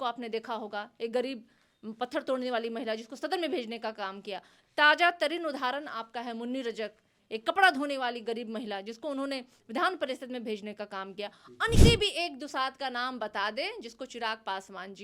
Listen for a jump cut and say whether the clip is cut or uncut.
cut